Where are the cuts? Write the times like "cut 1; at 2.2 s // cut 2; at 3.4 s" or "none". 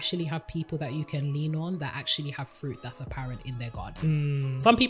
none